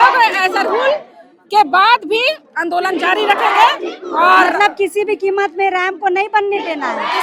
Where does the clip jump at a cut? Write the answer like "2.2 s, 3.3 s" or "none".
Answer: none